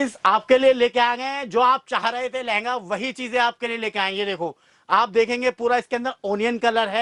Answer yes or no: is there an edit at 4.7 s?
no